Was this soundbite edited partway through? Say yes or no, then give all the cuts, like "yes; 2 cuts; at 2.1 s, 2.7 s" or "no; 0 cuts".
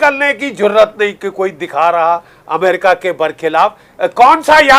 no; 0 cuts